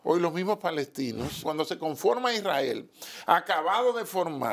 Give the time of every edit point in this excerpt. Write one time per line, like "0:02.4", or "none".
0:01.4